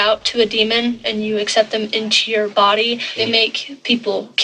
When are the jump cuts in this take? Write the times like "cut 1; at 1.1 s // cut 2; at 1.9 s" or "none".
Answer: cut 1; at 1.0 s // cut 2; at 3.2 s